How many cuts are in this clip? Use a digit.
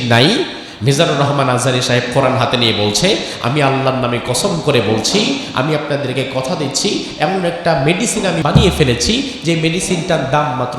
1